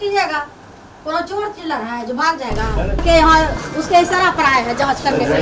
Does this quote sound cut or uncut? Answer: cut